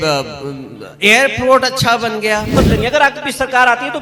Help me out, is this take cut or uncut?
cut